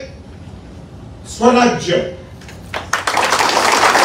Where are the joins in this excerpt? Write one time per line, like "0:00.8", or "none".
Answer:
none

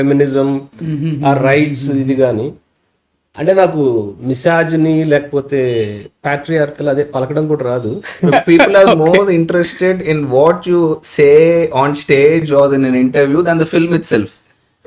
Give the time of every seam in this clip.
0:08.2

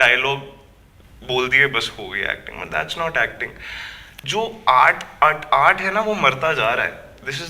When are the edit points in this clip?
0:04.1

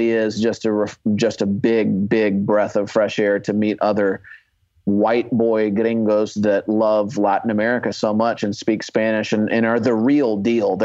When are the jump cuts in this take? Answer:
none

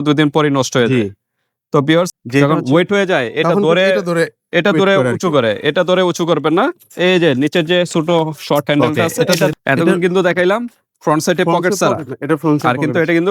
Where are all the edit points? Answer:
0:02.2
0:09.5

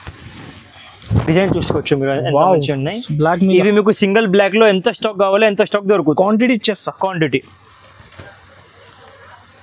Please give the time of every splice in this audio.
none

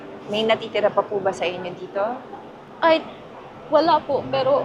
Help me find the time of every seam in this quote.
0:02.7

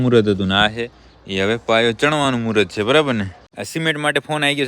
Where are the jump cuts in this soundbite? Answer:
0:03.4

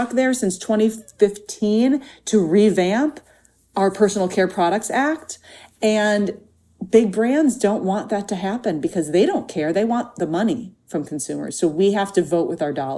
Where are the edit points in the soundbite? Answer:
none

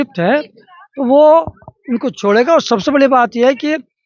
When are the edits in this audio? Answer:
none

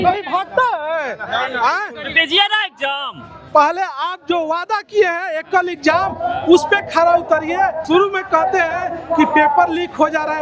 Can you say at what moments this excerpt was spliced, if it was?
0:07.8

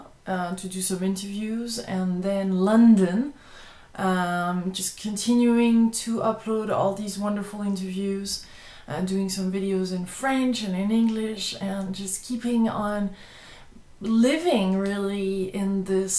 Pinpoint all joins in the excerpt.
0:00.8
0:12.7

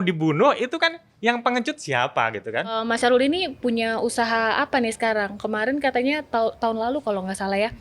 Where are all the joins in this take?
0:02.8

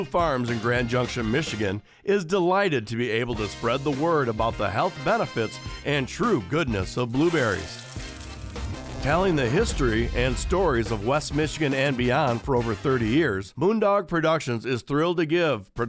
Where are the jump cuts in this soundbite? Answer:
0:13.5

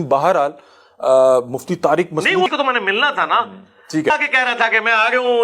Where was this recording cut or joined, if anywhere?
0:02.5
0:04.1

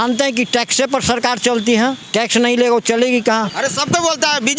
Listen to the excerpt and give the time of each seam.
0:02.0
0:03.5

